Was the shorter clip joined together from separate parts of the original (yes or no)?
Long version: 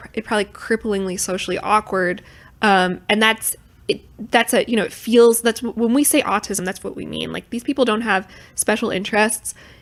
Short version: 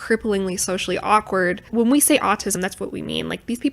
yes